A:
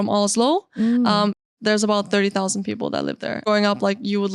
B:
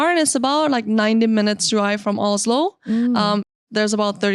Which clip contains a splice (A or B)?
A